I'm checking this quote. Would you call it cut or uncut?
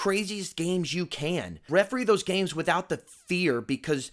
cut